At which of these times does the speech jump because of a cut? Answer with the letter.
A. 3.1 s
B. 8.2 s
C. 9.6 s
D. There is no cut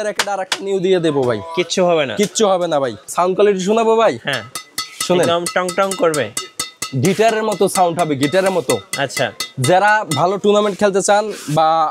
A